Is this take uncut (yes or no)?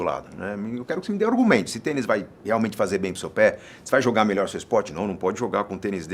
yes